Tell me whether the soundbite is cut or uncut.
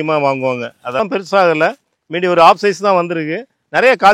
cut